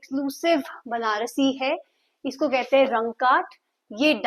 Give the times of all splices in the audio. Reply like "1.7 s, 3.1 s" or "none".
none